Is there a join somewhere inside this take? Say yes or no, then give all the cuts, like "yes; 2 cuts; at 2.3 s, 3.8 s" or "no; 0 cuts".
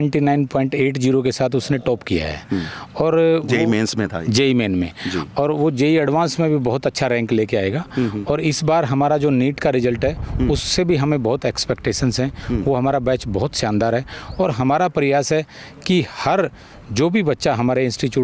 no; 0 cuts